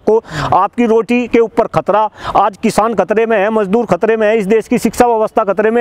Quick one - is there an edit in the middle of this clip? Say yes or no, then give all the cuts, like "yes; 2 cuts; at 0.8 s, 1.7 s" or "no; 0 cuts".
no; 0 cuts